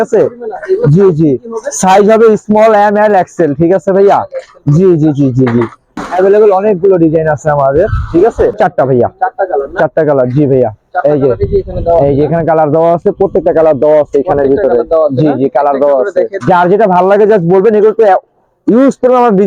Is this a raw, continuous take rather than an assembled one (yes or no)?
no